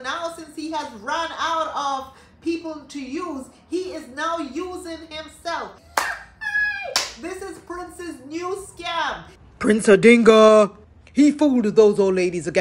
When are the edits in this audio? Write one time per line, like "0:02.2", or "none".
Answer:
0:05.8
0:09.3